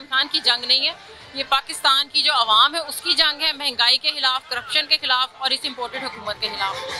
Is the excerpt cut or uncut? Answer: uncut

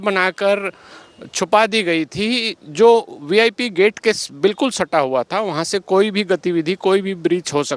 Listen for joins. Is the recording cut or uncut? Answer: uncut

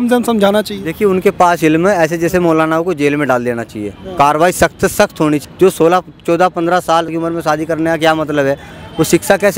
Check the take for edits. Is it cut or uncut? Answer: cut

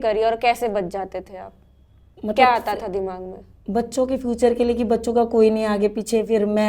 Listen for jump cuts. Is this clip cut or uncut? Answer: uncut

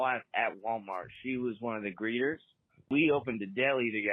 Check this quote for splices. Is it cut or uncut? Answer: cut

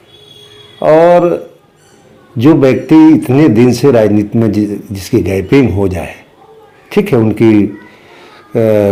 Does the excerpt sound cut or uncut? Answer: uncut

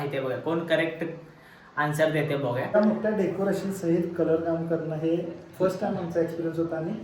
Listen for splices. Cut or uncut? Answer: cut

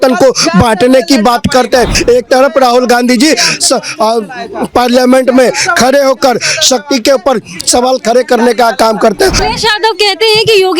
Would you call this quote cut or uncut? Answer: cut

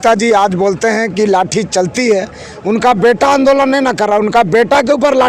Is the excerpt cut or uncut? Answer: uncut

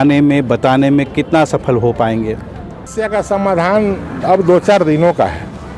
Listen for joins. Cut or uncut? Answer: cut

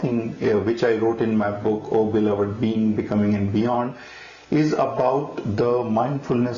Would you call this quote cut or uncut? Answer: uncut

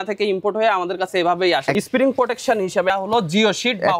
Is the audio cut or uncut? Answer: cut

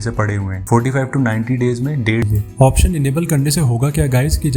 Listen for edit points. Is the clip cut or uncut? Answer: cut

